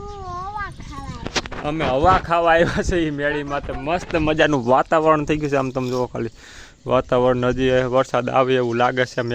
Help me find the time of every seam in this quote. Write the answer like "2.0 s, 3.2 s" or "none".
none